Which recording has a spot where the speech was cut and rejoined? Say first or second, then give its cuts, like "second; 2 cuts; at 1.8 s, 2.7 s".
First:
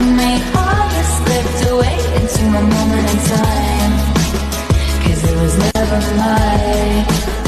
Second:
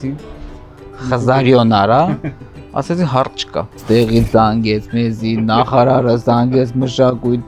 second; 1 cut; at 3.8 s